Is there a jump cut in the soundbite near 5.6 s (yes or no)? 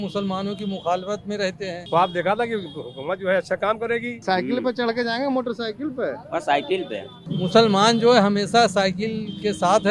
no